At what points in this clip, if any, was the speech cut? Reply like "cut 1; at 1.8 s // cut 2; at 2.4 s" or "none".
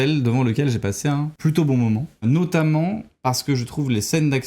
cut 1; at 1.3 s // cut 2; at 2.2 s